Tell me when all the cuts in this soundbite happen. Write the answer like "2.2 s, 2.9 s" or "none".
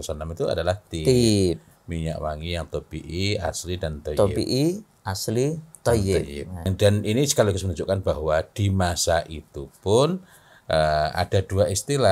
6.7 s